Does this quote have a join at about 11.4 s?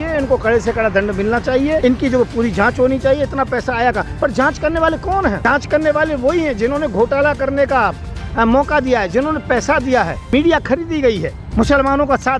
yes; 4 cuts; at 1.8 s, 5.4 s, 10.3 s, 11.4 s

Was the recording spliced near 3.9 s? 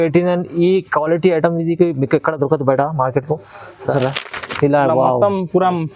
yes; 1 cut; at 3.9 s

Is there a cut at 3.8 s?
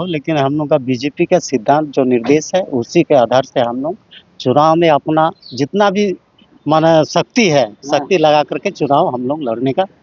no; 0 cuts

